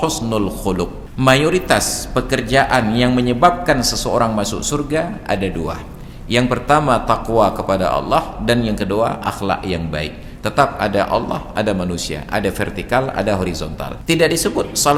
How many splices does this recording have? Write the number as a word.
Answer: two